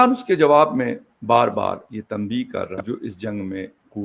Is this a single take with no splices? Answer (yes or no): no